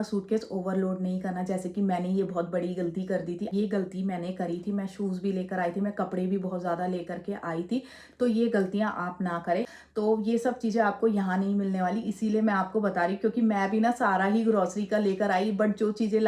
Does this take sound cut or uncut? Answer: cut